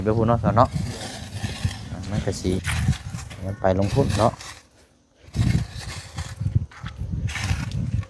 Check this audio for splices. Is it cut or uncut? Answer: cut